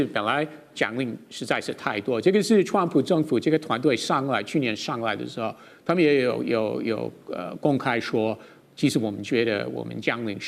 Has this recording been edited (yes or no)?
no